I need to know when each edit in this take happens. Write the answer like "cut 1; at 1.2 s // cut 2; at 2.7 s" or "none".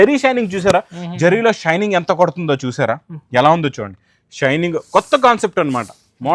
none